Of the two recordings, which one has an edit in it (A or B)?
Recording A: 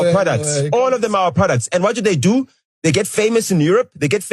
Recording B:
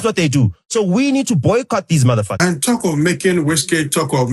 B